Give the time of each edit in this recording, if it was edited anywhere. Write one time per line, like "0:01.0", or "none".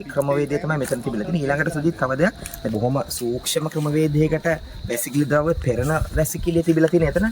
0:02.7